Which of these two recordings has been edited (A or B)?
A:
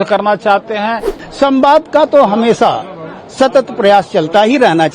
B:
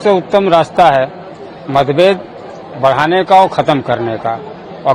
A